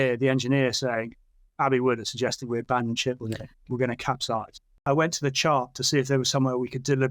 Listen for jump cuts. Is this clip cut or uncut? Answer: cut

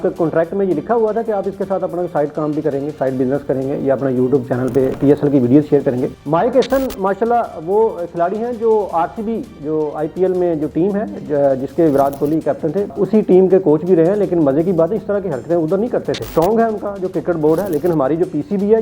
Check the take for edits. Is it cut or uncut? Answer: cut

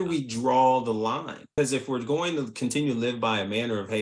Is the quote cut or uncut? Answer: cut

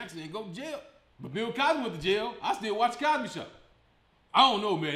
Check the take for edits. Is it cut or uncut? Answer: cut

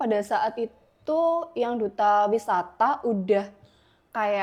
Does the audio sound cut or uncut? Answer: uncut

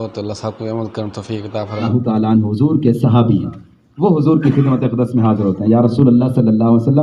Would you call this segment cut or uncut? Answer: cut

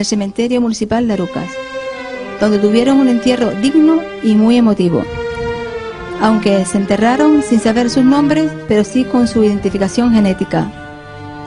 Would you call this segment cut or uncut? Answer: uncut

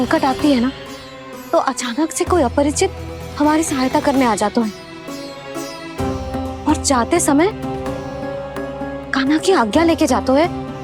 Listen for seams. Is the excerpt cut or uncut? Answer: uncut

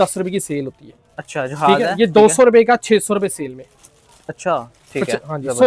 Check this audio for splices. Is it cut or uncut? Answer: uncut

